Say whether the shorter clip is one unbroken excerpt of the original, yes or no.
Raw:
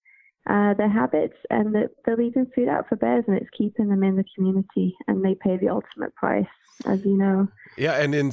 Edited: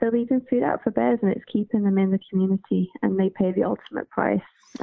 yes